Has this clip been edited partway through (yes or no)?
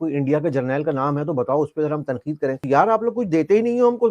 yes